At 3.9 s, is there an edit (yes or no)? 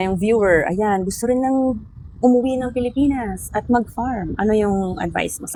no